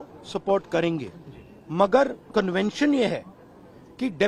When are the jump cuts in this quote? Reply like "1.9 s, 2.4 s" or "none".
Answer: none